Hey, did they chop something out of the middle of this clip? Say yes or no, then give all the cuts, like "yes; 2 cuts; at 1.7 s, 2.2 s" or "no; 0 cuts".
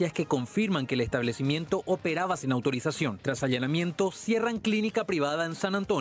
no; 0 cuts